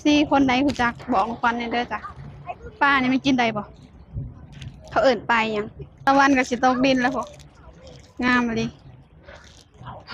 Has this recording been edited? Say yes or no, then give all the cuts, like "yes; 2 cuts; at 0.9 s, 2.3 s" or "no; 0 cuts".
yes; 1 cut; at 6.1 s